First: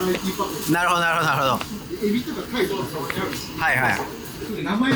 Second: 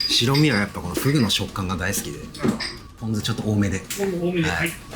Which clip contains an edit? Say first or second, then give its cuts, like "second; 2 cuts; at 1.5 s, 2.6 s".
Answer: second; 1 cut; at 3.0 s